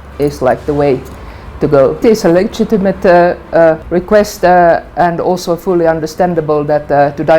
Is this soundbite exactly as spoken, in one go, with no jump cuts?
no; 2 cuts; at 2.0 s, 3.8 s

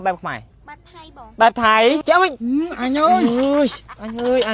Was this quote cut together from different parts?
yes; 1 cut; at 2.0 s

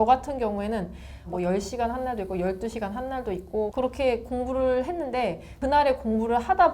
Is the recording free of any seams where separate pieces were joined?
no; 3 cuts; at 1.3 s, 3.7 s, 5.5 s

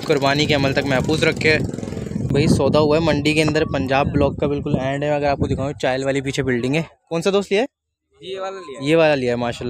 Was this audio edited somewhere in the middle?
yes; 1 cut; at 2.3 s

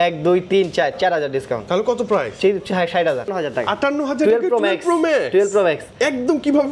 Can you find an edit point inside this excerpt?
yes; 1 cut; at 3.3 s

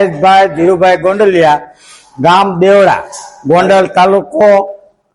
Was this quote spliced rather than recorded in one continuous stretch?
no; 0 cuts

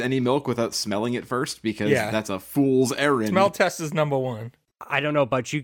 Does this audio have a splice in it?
yes; 1 cut; at 4.6 s

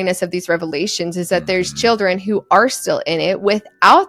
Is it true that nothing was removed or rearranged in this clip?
yes; 0 cuts

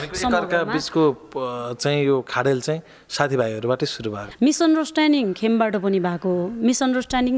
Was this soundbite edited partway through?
yes; 1 cut; at 4.2 s

